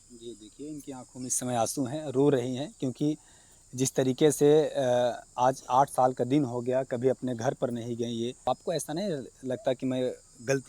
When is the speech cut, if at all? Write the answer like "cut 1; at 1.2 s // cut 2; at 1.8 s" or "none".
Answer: cut 1; at 8.5 s